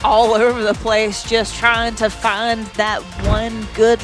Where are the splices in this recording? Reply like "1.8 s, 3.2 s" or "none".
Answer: none

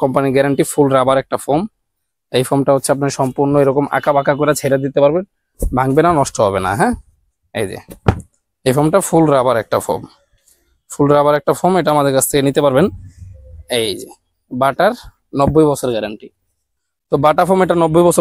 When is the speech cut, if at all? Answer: none

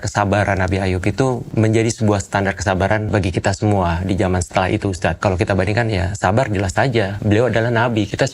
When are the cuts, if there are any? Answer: 1.5 s, 3.1 s, 5.2 s, 7.2 s

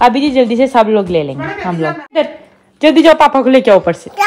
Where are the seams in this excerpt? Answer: 2.2 s

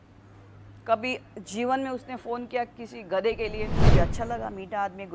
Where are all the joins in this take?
3.9 s

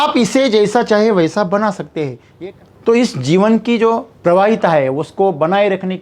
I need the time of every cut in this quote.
2.2 s, 4.1 s

